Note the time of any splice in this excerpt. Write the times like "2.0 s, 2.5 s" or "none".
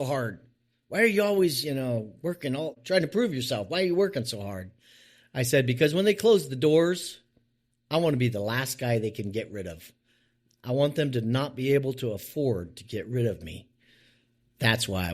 2.8 s